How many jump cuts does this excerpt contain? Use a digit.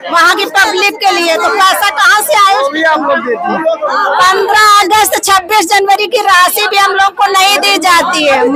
0